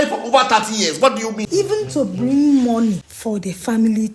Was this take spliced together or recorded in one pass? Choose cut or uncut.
cut